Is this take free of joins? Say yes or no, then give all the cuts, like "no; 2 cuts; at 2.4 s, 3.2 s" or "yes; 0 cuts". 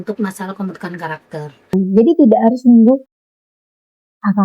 no; 1 cut; at 1.7 s